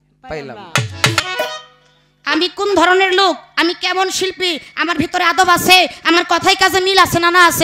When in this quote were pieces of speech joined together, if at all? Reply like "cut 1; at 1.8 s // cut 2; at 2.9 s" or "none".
cut 1; at 1.2 s